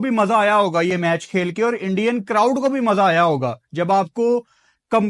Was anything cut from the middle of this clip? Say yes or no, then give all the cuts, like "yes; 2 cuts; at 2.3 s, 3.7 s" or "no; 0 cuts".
no; 0 cuts